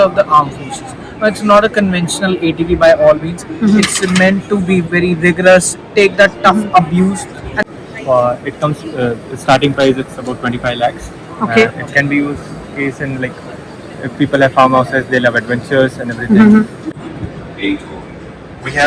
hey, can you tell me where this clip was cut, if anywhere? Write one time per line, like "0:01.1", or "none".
0:07.5
0:17.0